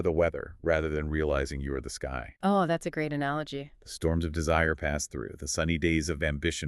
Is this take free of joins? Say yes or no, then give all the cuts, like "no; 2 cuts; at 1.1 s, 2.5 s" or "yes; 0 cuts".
yes; 0 cuts